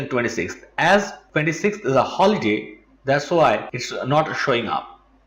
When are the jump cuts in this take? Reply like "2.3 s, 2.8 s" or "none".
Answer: none